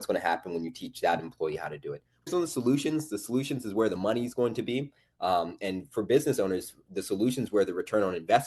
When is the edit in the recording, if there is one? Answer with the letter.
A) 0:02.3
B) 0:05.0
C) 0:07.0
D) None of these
A